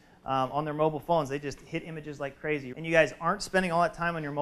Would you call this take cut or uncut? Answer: cut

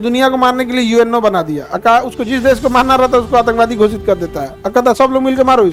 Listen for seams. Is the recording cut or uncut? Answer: uncut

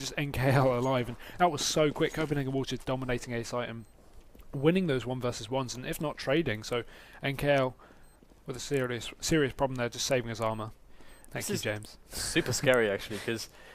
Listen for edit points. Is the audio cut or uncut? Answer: uncut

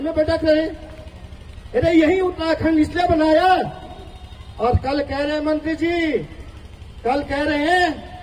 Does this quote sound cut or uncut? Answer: uncut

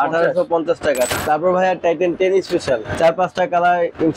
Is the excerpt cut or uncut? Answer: cut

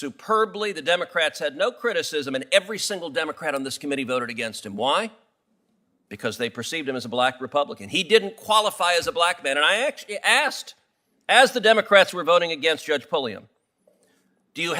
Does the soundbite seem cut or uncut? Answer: uncut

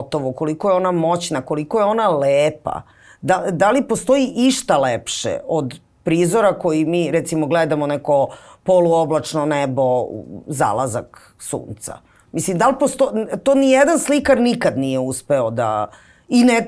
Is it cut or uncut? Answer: uncut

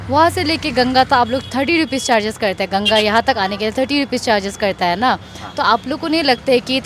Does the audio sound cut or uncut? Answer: uncut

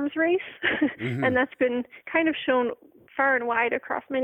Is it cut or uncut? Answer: cut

